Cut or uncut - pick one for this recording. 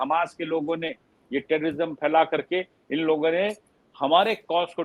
uncut